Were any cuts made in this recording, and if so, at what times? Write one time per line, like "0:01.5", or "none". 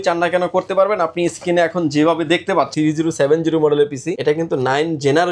0:02.7
0:04.1